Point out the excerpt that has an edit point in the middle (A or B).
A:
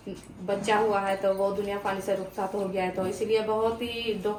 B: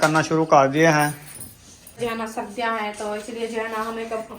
B